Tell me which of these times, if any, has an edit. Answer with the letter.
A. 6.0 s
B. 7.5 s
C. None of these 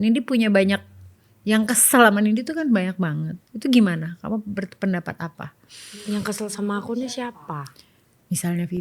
C